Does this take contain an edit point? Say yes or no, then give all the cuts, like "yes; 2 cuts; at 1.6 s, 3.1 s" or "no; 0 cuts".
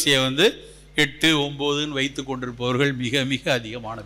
no; 0 cuts